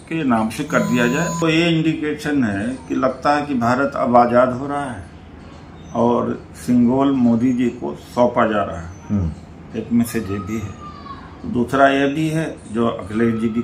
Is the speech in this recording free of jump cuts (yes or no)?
no